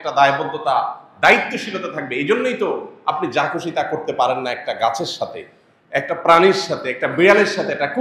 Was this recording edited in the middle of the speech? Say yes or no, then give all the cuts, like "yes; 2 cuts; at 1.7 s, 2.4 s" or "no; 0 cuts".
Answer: no; 0 cuts